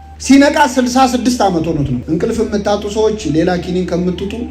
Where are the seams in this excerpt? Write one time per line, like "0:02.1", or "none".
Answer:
0:02.0